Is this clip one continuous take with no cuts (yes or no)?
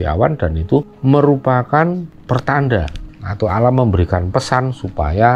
yes